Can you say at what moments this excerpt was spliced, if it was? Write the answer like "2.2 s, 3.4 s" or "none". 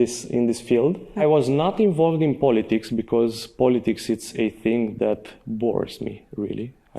1.2 s